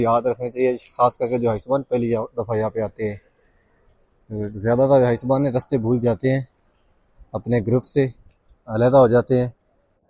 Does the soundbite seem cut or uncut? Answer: uncut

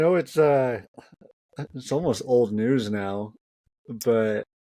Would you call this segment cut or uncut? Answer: uncut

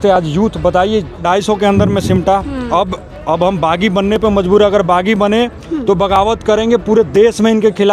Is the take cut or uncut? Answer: cut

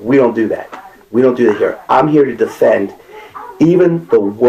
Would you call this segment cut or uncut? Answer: uncut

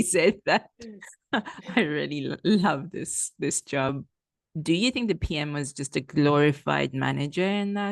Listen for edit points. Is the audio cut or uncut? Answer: cut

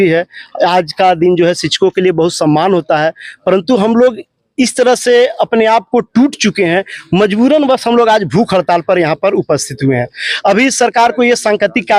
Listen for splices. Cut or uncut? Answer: uncut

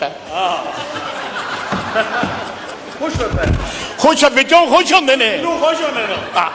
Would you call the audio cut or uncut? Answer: uncut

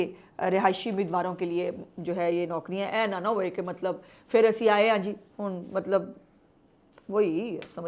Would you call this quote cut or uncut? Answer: uncut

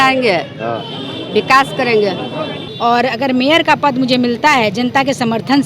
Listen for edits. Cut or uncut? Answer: uncut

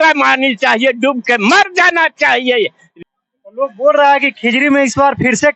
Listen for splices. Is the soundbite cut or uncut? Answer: cut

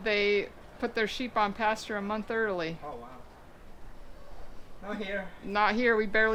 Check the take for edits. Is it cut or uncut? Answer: uncut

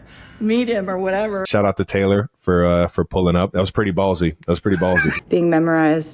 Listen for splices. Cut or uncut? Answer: cut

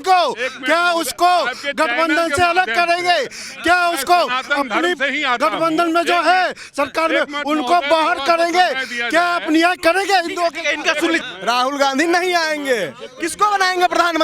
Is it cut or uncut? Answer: cut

